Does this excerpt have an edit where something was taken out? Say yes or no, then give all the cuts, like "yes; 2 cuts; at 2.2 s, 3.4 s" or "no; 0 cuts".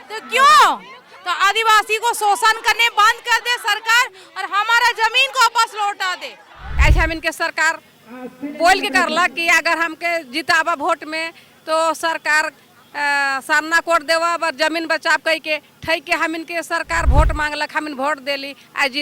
yes; 1 cut; at 6.7 s